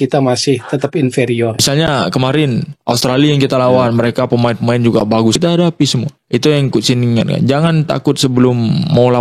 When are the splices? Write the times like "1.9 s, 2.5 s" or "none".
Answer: 1.6 s, 5.4 s